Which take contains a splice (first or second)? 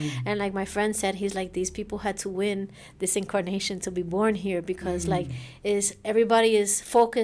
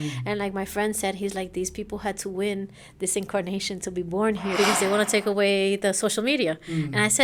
second